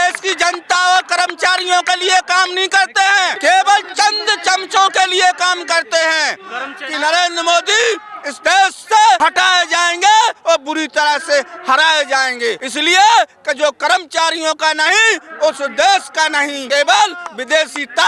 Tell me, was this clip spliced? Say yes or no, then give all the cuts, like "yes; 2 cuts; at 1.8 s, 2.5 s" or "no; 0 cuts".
yes; 5 cuts; at 3.3 s, 6.8 s, 9.2 s, 12.7 s, 16.6 s